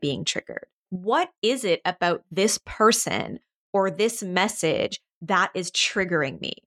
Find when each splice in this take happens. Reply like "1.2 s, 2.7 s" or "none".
0.9 s